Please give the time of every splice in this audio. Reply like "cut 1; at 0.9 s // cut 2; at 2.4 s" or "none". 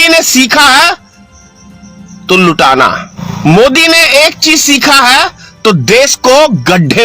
cut 1; at 3.3 s